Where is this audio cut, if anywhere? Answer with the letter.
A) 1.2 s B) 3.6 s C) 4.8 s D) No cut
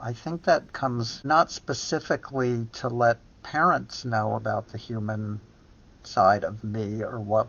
A